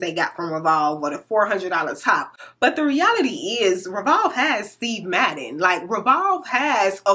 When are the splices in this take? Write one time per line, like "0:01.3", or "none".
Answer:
none